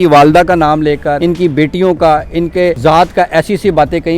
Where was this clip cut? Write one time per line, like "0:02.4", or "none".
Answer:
0:01.2
0:02.8